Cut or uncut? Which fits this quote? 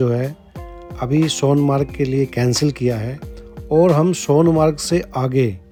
uncut